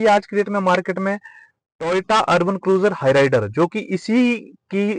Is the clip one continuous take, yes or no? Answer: yes